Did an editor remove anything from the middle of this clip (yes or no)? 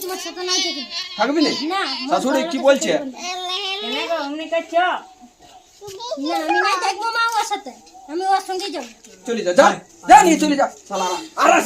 yes